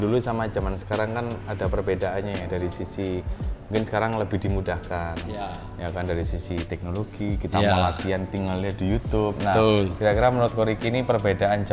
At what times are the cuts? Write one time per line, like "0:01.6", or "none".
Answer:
none